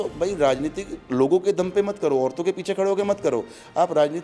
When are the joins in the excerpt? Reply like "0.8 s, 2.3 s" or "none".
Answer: none